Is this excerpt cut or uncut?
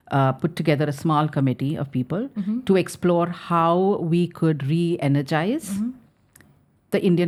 uncut